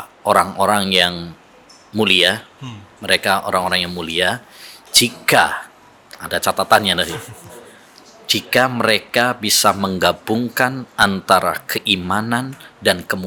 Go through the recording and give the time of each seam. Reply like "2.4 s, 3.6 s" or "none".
none